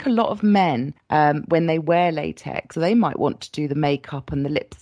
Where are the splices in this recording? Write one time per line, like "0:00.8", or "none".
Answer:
0:00.9
0:02.7